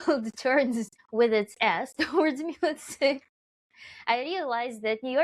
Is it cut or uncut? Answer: cut